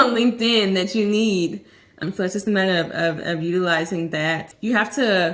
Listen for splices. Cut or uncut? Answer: cut